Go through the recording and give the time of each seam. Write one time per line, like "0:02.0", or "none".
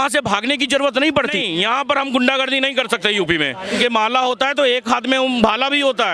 0:01.2
0:03.8